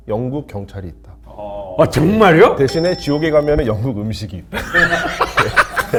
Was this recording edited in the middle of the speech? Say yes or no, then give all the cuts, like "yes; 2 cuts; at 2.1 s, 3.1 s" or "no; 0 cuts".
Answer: no; 0 cuts